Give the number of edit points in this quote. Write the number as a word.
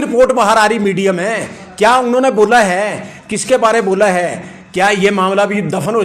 zero